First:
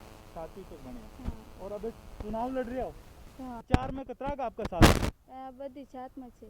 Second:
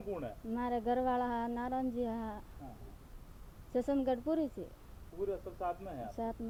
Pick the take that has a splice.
first; 2 cuts; at 3.6 s, 5.2 s

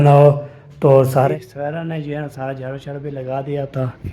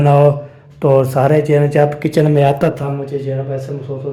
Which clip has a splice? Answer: first; 1 cut; at 1.3 s

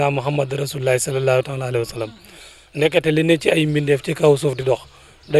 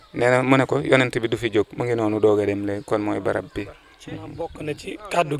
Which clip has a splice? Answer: second; 1 cut; at 4.3 s

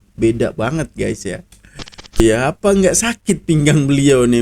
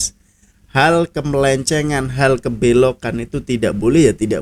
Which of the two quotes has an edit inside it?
first; 1 cut; at 2.2 s

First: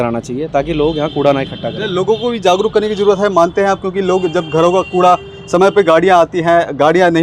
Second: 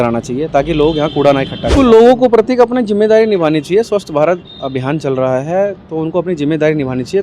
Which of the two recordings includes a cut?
second; 1 cut; at 1.7 s

